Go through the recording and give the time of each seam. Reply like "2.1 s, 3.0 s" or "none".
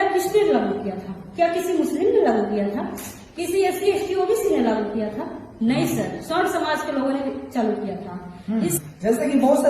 8.8 s